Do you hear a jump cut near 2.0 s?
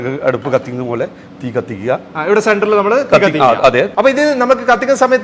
no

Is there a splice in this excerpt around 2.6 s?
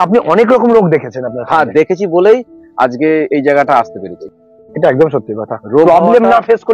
no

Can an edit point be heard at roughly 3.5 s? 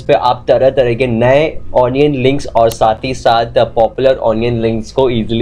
no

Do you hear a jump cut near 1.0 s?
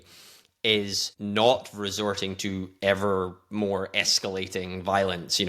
yes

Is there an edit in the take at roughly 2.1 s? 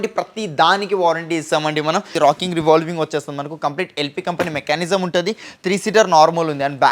yes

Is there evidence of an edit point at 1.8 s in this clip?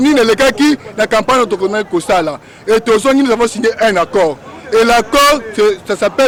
no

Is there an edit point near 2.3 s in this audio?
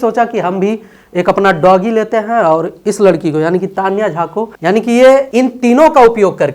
no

